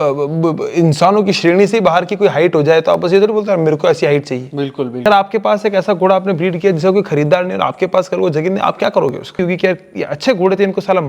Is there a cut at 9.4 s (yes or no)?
yes